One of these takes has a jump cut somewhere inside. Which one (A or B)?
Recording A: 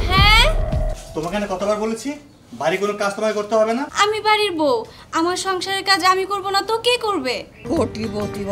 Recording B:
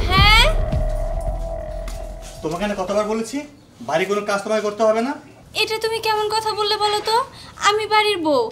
A